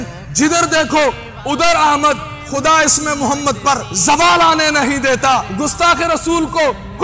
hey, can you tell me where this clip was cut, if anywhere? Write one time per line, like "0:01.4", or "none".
0:02.3
0:03.9
0:05.5